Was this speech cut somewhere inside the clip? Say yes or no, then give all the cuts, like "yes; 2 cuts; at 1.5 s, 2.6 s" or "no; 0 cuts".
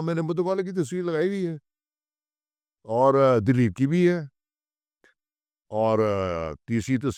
no; 0 cuts